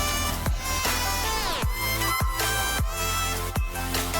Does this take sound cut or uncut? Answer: cut